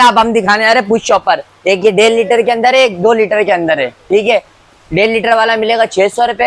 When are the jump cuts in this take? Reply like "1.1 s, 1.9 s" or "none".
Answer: none